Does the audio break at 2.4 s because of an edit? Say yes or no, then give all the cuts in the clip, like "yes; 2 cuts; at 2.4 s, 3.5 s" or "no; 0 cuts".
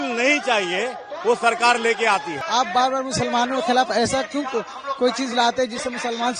yes; 1 cut; at 2.4 s